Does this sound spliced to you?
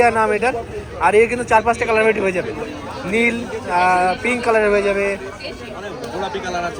no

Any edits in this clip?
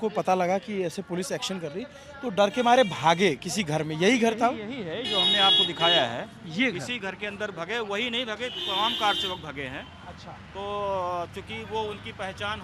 no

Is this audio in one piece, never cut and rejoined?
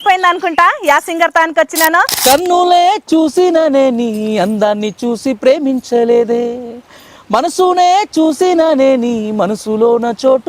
no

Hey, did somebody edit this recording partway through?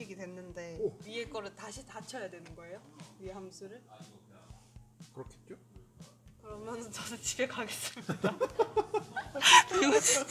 yes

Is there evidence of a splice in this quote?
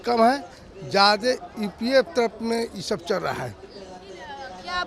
no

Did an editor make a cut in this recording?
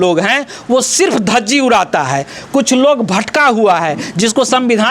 no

